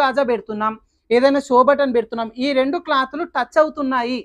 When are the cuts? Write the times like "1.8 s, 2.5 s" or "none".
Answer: none